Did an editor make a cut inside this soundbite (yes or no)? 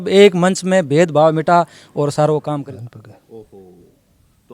yes